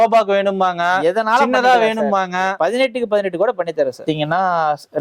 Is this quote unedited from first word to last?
no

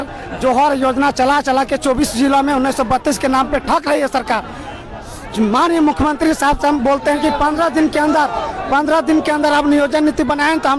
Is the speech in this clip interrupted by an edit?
no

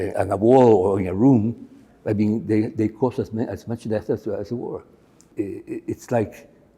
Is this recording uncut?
no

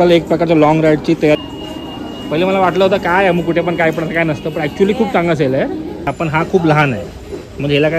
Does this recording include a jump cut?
yes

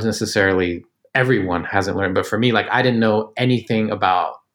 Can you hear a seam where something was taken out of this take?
no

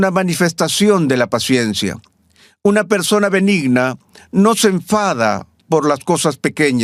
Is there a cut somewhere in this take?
no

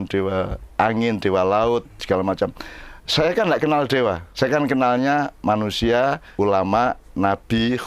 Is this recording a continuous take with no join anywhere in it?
no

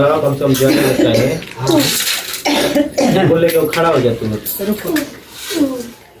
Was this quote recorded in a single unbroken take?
yes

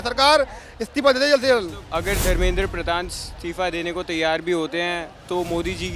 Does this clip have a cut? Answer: yes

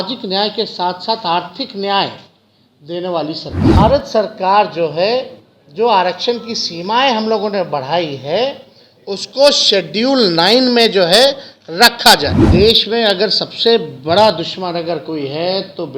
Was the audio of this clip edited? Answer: yes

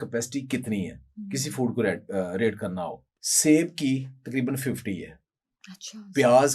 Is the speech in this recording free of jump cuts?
yes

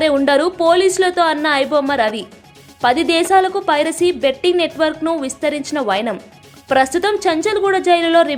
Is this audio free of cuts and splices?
yes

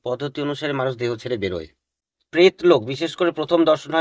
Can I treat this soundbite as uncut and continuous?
no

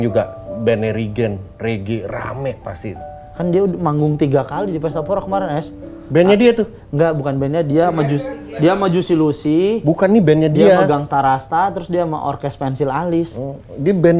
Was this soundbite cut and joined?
no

